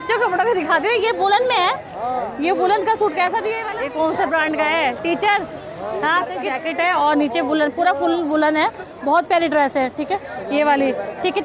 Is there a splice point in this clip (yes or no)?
yes